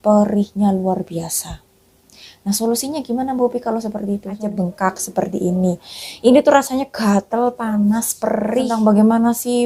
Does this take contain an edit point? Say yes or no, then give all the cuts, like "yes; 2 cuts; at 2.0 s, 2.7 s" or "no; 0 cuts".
yes; 2 cuts; at 4.5 s, 8.7 s